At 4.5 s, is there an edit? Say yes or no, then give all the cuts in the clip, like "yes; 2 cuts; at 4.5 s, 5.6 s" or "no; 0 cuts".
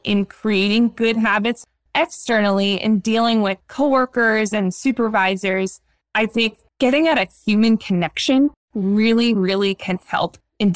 no; 1 cut; at 1.6 s